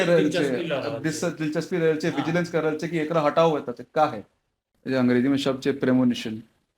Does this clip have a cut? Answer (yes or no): yes